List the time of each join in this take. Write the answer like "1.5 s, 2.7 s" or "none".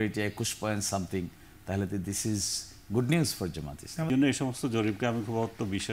4.1 s

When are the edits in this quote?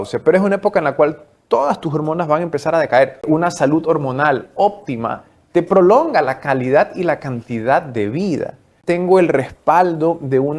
3.2 s, 8.7 s

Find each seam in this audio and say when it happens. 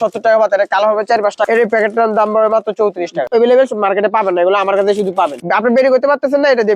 1.4 s, 3.3 s, 5.4 s

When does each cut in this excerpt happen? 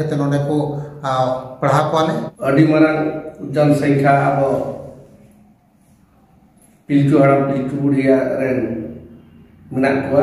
2.3 s

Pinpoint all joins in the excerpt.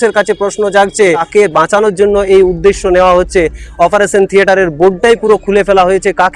1.3 s

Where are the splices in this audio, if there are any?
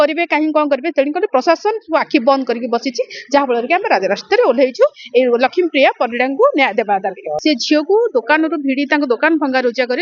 7.3 s

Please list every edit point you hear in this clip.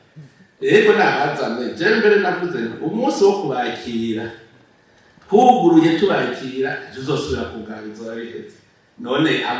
none

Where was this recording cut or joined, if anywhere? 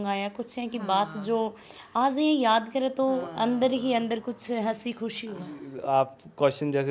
5.7 s

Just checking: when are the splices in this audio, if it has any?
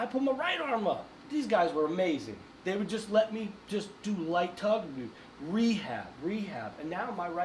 none

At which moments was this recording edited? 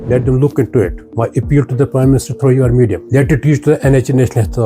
3.0 s

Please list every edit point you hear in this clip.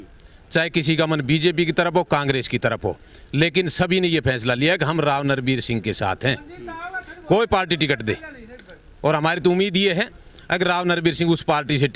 none

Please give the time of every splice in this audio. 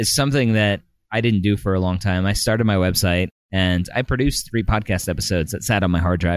none

